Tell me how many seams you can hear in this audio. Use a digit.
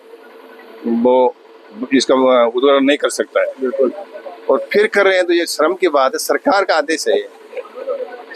0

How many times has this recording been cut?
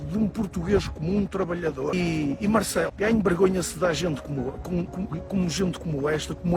2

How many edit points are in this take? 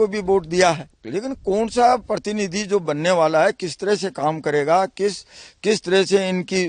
1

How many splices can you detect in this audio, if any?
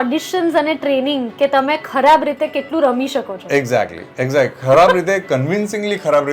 0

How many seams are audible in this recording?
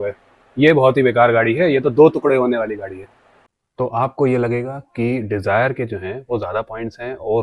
1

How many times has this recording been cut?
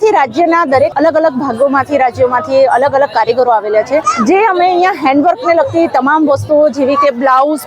2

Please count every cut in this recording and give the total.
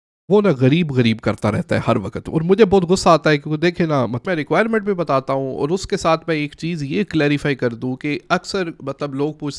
1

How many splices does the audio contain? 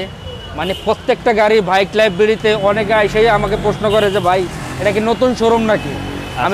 0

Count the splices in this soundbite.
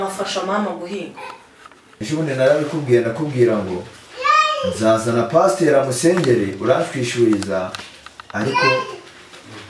1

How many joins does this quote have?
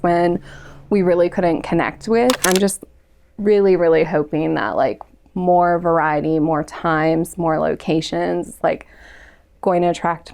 1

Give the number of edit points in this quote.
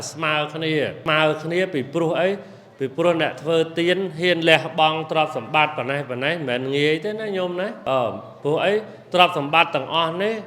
2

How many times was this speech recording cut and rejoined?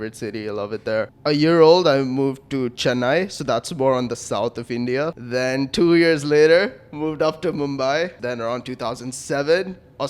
3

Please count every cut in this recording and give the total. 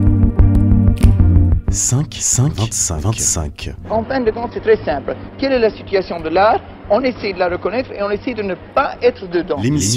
1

